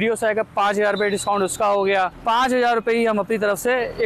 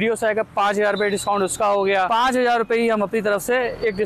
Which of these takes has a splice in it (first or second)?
second